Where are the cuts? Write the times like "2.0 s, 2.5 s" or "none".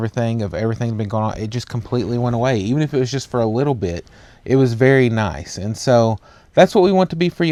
none